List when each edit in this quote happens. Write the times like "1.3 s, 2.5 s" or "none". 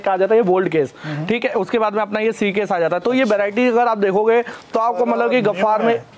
none